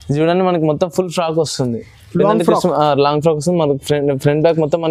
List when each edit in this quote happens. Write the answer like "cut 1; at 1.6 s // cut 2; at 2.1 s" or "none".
none